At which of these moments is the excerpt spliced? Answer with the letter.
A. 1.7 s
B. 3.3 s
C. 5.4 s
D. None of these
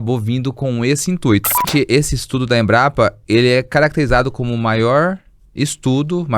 A